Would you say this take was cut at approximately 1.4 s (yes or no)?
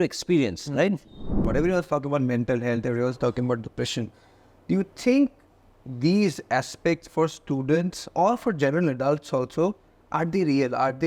yes